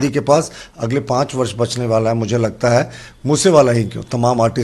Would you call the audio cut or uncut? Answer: uncut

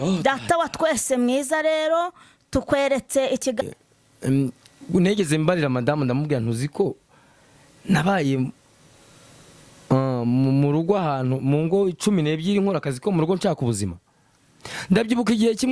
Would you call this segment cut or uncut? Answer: cut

